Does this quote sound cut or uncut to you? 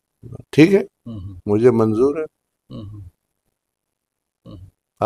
uncut